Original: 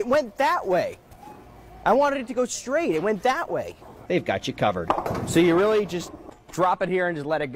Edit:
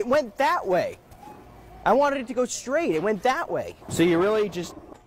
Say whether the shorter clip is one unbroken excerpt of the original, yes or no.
no